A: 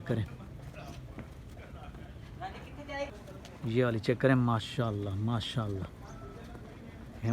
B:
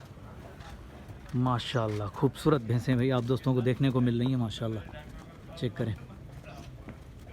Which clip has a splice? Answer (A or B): A